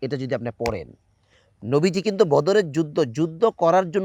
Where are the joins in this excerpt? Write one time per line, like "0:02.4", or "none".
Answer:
none